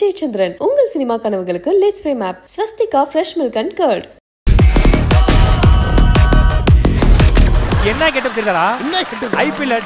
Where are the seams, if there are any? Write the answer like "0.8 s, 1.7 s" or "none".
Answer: 4.5 s